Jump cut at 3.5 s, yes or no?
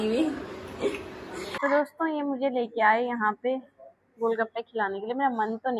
no